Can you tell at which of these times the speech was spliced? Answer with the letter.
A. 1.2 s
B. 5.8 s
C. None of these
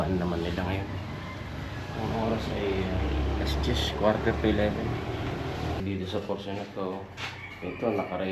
B